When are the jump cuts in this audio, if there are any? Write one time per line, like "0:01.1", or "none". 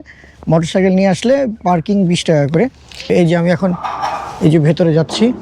0:03.1